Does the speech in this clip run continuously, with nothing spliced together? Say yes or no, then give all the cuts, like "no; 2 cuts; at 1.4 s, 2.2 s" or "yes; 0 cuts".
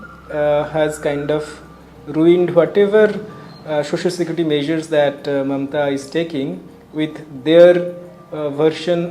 yes; 0 cuts